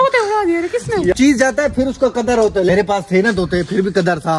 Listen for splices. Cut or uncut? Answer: cut